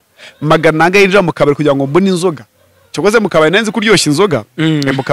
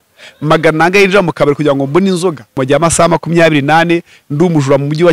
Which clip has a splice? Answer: second; 1 cut; at 2.6 s

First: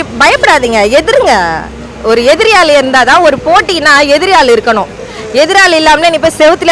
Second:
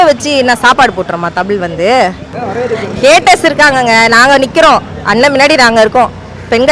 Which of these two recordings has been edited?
second; 1 cut; at 2.3 s

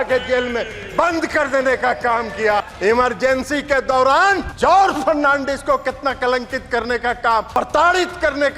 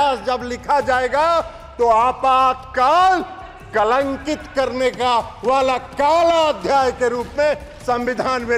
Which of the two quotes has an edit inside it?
first; 3 cuts; at 2.6 s, 4.5 s, 7.5 s

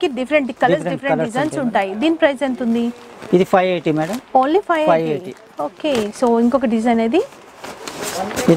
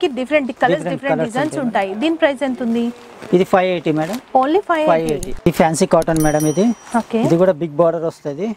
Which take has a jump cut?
second; 1 cut; at 5.3 s

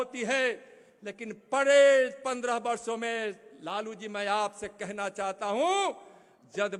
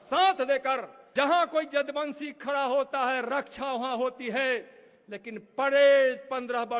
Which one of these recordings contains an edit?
second; 1 cut; at 0.9 s

